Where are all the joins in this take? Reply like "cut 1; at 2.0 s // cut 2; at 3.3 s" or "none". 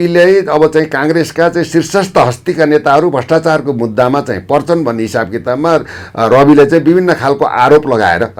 none